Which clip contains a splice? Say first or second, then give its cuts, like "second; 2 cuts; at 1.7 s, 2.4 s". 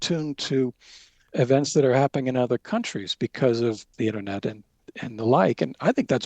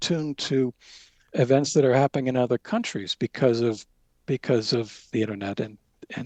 first; 1 cut; at 3.9 s